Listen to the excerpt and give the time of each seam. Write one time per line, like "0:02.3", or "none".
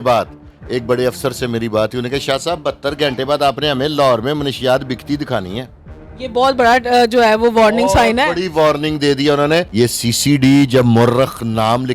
0:09.7